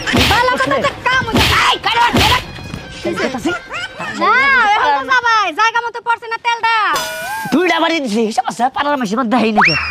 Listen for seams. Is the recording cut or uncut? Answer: uncut